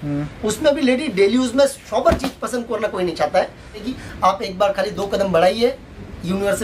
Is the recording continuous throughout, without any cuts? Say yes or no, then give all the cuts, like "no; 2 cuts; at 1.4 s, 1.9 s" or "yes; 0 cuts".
no; 1 cut; at 4.0 s